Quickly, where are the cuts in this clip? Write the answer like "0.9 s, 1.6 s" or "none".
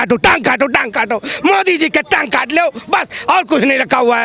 none